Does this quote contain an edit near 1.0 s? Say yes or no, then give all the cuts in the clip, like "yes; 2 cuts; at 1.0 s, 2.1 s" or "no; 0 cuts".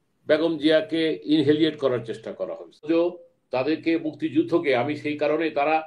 no; 1 cut; at 2.8 s